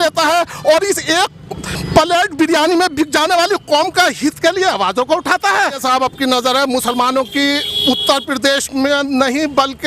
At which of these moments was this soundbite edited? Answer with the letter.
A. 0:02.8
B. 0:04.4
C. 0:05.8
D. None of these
C